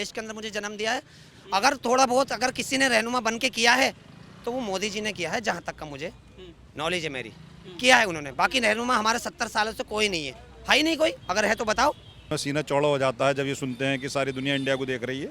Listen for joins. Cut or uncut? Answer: cut